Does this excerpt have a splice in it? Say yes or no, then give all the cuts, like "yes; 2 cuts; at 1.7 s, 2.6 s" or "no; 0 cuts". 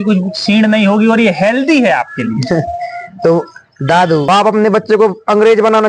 yes; 1 cut; at 4.3 s